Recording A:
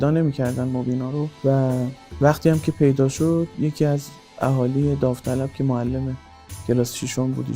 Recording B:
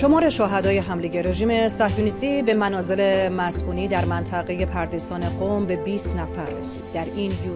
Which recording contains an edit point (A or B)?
A